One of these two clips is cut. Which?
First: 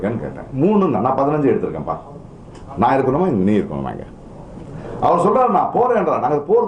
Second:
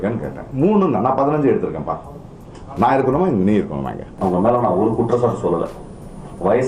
second; 1 cut; at 4.1 s

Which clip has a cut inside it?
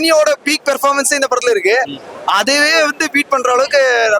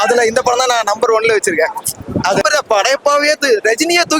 second; 1 cut; at 2.4 s

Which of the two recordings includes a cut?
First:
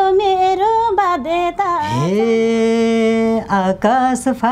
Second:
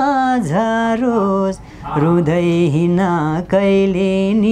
first; 1 cut; at 1.9 s

